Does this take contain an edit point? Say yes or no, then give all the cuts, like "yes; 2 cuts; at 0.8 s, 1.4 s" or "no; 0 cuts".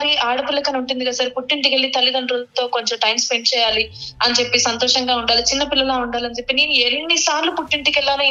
no; 0 cuts